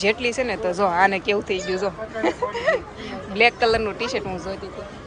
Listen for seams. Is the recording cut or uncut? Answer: uncut